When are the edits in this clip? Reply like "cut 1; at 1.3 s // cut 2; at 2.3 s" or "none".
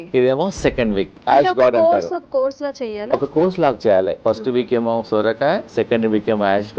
cut 1; at 4.1 s // cut 2; at 5.7 s